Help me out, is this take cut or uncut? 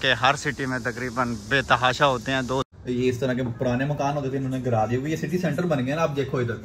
cut